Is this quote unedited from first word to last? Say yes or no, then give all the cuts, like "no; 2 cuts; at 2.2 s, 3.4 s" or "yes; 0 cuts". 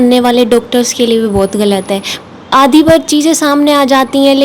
yes; 0 cuts